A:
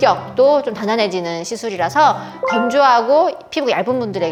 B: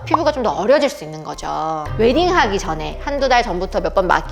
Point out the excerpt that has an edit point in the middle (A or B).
B